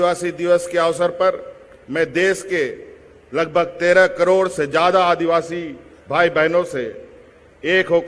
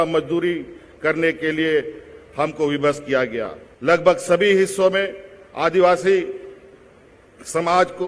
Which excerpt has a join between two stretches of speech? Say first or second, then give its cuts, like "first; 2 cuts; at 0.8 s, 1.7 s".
second; 1 cut; at 3.6 s